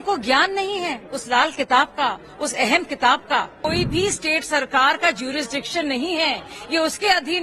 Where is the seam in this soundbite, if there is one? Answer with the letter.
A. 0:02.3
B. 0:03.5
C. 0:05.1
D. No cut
B